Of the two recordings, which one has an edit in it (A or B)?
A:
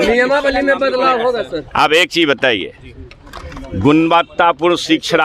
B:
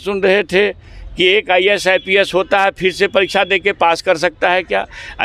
A